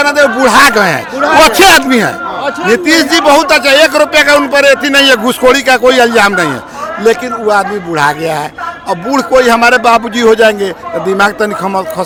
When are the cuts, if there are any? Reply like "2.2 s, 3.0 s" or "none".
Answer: none